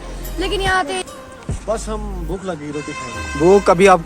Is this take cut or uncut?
cut